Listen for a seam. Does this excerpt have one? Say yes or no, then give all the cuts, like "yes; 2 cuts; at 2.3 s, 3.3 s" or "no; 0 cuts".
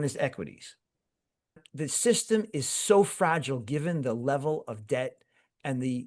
yes; 1 cut; at 1.7 s